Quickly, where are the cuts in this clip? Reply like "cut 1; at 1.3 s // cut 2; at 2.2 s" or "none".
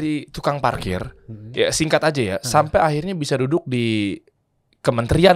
none